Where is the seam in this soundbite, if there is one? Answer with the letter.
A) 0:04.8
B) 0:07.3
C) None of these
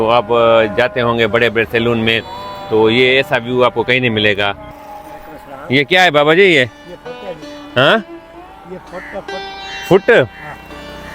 A